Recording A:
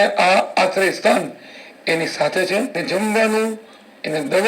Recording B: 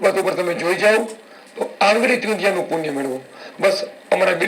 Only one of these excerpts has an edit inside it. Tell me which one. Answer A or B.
A